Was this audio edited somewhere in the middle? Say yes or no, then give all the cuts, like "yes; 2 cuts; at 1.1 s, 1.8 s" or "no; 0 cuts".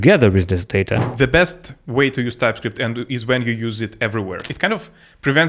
yes; 2 cuts; at 1.0 s, 4.4 s